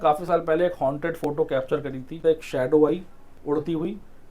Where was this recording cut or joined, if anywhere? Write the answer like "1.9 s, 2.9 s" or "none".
2.1 s